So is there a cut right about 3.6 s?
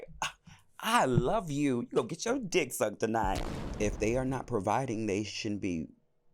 yes; 1 cut; at 3.6 s

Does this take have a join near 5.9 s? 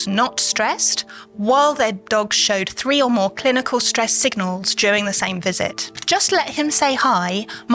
yes; 1 cut; at 5.9 s

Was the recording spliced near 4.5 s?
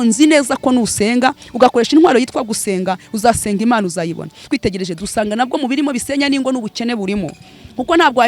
yes; 1 cut; at 4.5 s

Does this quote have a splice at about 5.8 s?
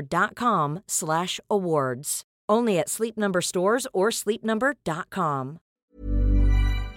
yes; 1 cut; at 5.8 s

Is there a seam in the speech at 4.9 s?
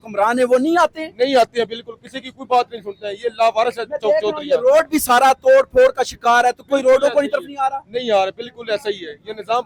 no; 0 cuts

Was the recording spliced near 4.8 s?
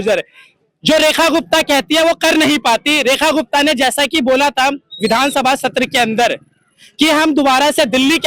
no; 0 cuts

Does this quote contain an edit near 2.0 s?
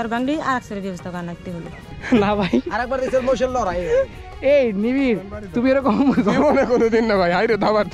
yes; 1 cut; at 2.0 s

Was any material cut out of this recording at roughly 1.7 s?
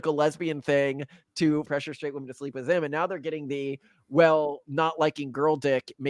yes; 1 cut; at 1.7 s

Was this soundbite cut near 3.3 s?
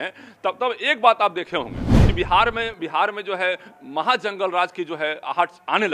no; 0 cuts

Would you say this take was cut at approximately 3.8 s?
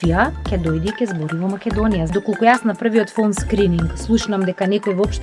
no; 1 cut; at 2.1 s

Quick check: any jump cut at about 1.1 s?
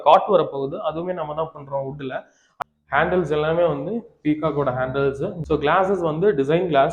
no; 2 cuts; at 2.4 s, 5.4 s

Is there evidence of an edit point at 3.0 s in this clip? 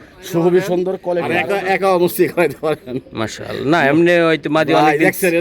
no; 1 cut; at 1.4 s

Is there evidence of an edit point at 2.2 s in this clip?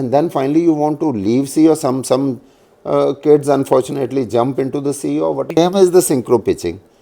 no; 1 cut; at 5.6 s

